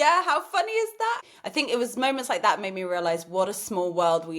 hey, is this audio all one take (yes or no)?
no